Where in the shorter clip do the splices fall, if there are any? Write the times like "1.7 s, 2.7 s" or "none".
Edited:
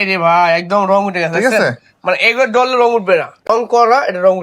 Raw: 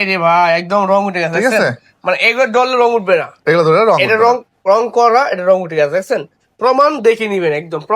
3.5 s